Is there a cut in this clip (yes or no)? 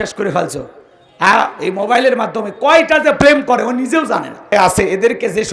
yes